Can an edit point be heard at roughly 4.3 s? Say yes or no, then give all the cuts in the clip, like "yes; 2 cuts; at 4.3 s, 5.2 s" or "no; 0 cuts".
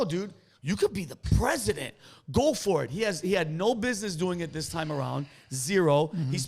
no; 1 cut; at 1.1 s